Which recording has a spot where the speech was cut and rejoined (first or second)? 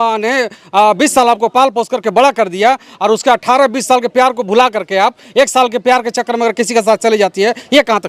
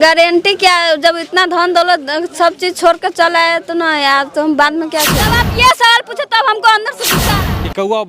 second